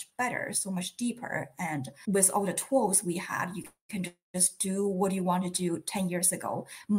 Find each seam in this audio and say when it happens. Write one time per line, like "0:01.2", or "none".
0:01.9